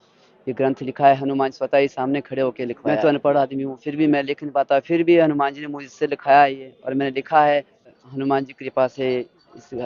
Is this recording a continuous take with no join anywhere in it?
no; 2 cuts; at 2.8 s, 8.0 s

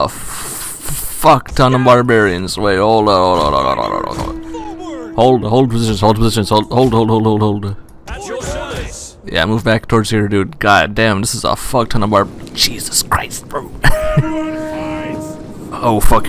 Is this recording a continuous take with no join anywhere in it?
yes; 0 cuts

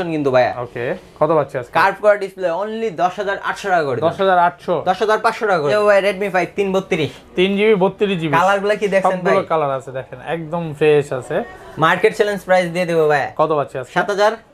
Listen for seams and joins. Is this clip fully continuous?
yes; 0 cuts

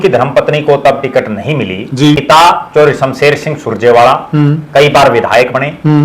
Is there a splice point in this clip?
yes; 1 cut; at 2.2 s

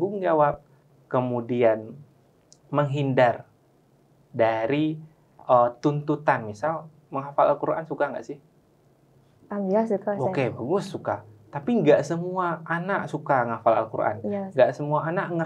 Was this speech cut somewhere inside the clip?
no; 0 cuts

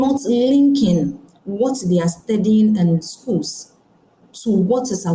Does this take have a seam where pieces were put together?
no; 0 cuts

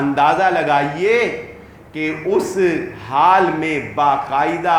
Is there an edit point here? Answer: no; 0 cuts

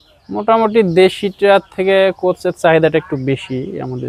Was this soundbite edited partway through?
no; 0 cuts

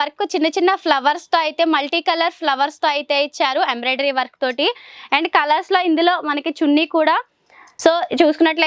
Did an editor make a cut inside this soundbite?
yes; 1 cut; at 7.7 s

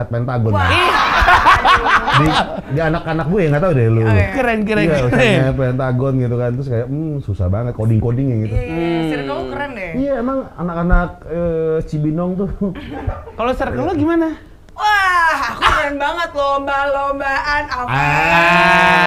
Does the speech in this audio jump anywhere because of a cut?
no; 0 cuts

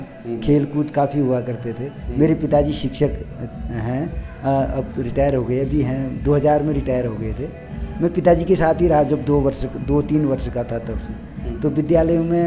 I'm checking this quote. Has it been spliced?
no; 0 cuts

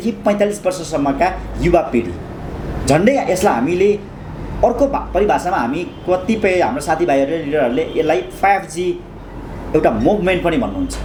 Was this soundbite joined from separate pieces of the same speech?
no; 0 cuts

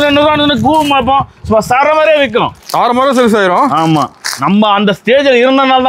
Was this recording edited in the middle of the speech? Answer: no; 0 cuts

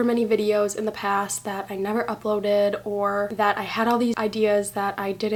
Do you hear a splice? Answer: no; 0 cuts

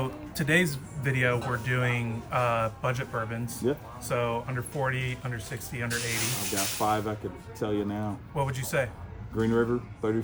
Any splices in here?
no; 0 cuts

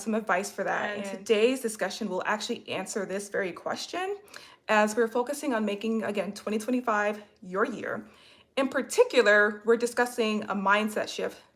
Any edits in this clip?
yes; 1 cut; at 1.1 s

